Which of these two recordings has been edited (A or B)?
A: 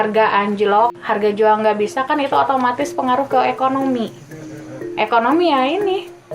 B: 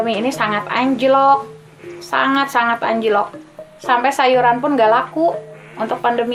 A